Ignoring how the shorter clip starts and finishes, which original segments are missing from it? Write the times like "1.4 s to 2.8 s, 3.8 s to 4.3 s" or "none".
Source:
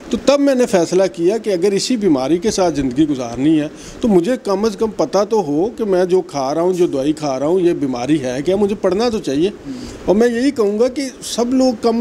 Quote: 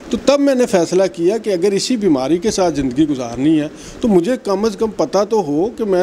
none